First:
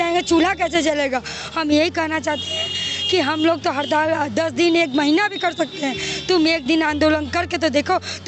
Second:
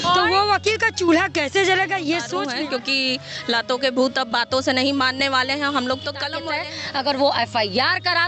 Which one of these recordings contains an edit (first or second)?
second